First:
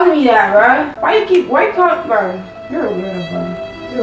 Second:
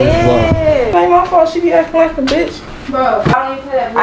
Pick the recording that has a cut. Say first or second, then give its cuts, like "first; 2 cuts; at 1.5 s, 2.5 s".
second; 2 cuts; at 0.9 s, 3.3 s